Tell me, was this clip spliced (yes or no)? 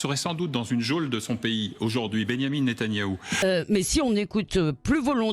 yes